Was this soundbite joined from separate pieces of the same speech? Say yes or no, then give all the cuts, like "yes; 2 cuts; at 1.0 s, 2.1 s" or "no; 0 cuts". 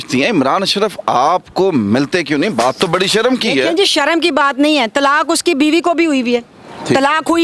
no; 0 cuts